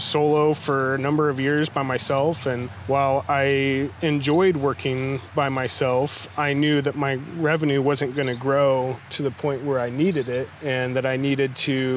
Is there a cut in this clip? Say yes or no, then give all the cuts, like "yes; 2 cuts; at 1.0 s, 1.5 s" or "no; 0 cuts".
yes; 2 cuts; at 2.7 s, 10.5 s